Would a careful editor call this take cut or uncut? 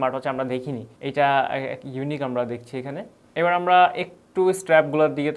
uncut